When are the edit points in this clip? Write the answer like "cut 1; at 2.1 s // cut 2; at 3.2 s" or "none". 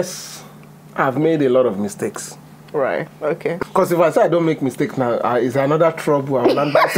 none